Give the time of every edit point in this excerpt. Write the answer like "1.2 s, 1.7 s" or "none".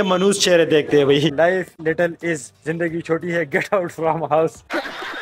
1.3 s